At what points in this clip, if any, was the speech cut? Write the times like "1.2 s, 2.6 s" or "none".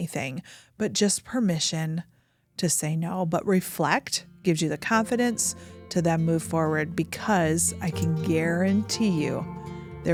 none